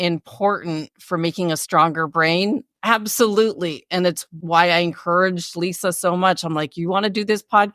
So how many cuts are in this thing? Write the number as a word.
one